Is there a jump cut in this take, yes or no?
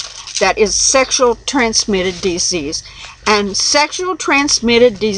yes